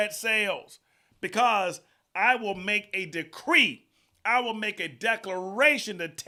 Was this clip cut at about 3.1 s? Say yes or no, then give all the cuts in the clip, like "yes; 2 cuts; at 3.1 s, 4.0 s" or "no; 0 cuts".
no; 0 cuts